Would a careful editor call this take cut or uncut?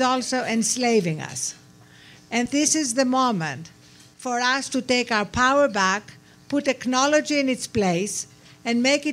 cut